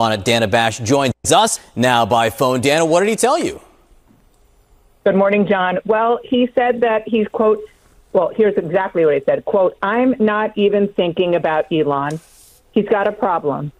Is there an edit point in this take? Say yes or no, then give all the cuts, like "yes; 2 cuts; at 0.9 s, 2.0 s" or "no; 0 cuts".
no; 0 cuts